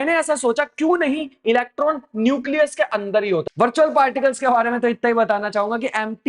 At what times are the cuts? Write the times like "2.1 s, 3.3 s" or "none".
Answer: 3.4 s